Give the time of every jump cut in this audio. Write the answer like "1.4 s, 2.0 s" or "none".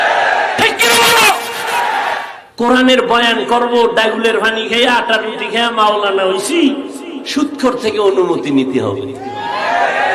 2.4 s